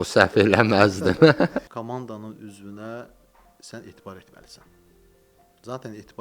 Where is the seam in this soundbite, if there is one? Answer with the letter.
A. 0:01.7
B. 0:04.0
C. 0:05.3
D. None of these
A